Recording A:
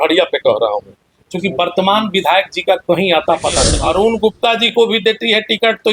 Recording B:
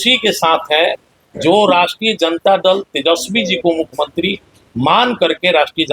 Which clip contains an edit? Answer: A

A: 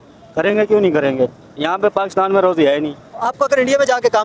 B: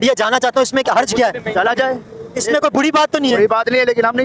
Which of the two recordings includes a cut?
A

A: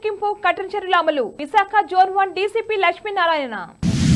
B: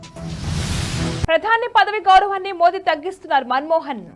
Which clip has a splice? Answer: B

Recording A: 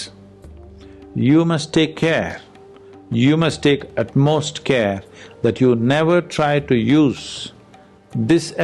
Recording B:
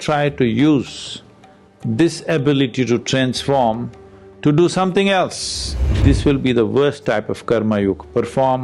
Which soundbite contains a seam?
B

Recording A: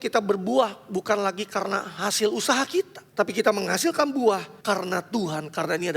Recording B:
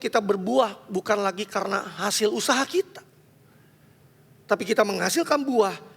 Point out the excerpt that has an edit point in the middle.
A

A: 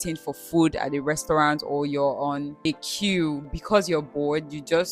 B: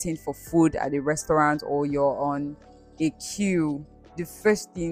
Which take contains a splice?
A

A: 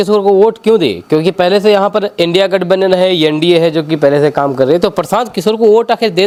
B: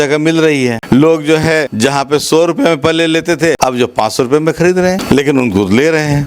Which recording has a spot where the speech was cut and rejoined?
B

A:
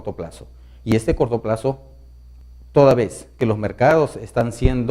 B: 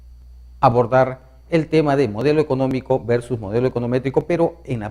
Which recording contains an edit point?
A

